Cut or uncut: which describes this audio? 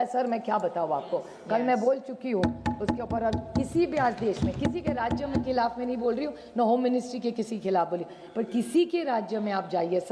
uncut